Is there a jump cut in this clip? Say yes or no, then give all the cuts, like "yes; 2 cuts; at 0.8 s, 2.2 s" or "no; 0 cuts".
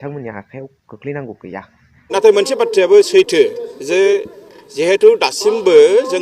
yes; 1 cut; at 2.1 s